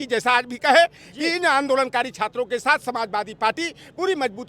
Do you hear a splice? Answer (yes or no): no